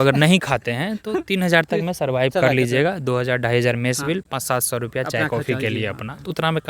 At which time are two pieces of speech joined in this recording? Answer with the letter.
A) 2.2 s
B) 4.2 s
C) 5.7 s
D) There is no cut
D